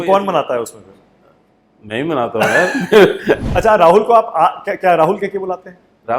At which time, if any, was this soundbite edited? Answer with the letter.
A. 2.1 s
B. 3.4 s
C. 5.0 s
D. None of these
B